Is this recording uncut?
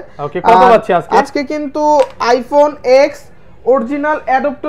yes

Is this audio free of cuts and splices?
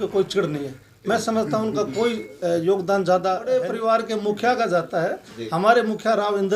no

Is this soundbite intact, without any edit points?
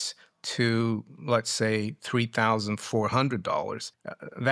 yes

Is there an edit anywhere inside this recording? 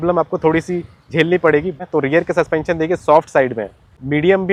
no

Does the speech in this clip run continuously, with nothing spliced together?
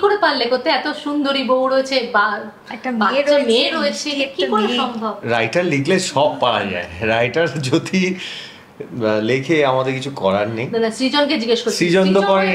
yes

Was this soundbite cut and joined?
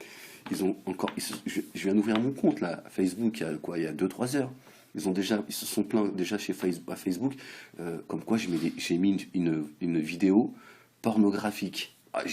yes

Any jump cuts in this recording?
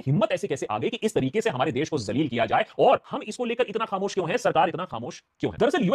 no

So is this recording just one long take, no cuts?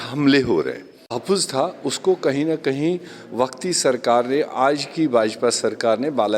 no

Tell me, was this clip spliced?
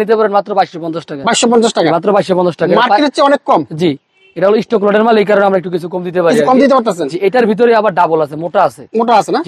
no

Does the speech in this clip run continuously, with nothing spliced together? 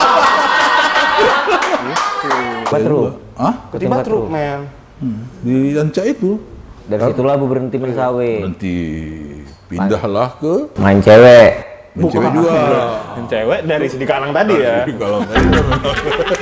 no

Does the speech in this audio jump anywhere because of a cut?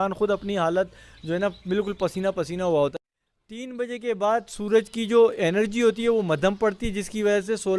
yes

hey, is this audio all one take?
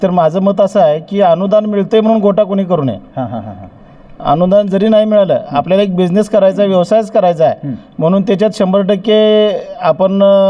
yes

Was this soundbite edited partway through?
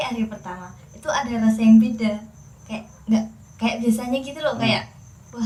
no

